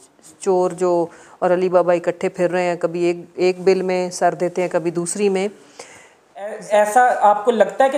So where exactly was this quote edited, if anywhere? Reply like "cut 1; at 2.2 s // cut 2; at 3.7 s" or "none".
cut 1; at 6.6 s